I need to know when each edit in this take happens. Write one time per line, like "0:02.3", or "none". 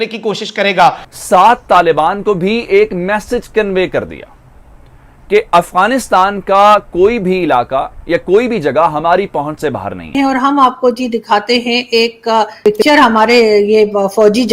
0:00.9
0:10.1
0:12.5